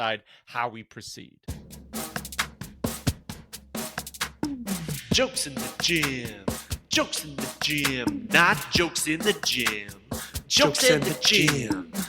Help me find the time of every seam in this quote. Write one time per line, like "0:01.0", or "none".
0:01.3